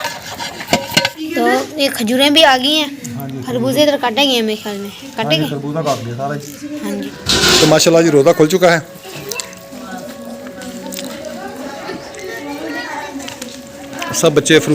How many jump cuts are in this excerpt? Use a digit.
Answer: 3